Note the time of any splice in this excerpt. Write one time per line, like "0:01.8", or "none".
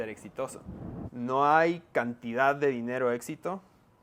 0:01.0